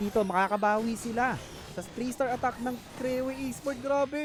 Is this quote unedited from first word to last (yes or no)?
yes